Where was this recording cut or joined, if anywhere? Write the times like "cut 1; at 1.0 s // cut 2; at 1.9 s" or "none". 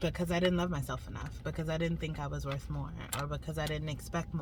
none